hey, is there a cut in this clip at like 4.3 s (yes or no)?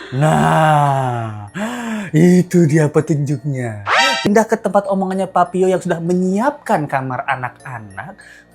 yes